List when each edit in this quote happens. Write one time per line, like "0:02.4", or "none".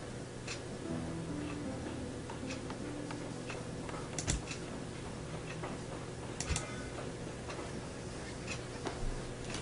none